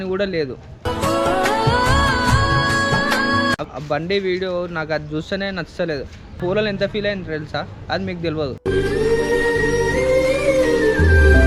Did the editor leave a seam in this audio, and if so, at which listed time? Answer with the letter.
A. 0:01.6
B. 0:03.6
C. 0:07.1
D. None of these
B